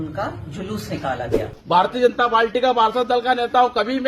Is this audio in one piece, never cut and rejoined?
no; 1 cut; at 1.6 s

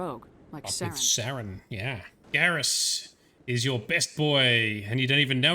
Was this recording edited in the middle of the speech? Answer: yes; 1 cut; at 2.2 s

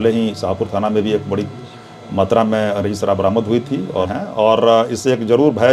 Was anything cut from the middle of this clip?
yes; 1 cut; at 4.1 s

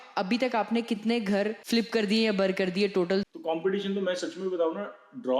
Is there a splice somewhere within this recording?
yes; 2 cuts; at 1.6 s, 3.3 s

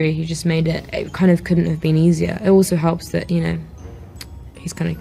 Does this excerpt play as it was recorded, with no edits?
yes; 0 cuts

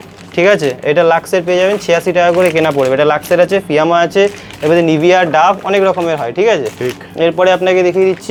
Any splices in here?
no; 0 cuts

